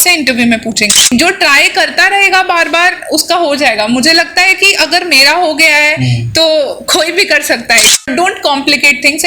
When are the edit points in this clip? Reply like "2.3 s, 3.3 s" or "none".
1.0 s, 8.1 s